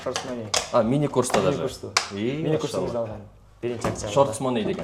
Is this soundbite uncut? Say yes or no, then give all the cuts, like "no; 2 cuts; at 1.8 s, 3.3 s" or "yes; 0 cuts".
yes; 0 cuts